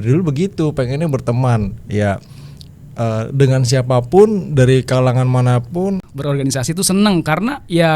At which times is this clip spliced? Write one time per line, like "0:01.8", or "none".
0:06.0